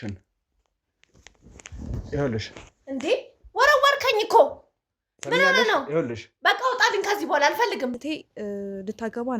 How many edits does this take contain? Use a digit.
1